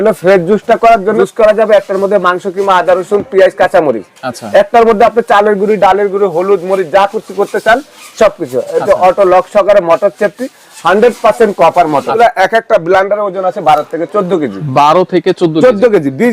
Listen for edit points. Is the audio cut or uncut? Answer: cut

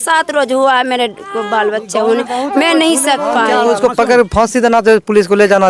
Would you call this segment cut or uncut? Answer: cut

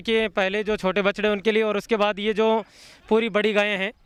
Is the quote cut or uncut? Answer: uncut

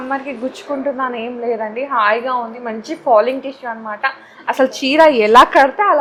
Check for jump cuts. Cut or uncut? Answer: uncut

